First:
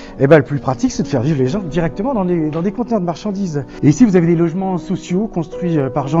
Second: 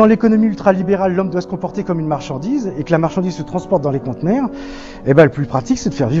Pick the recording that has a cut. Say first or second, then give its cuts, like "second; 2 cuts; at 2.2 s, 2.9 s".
first; 1 cut; at 3.7 s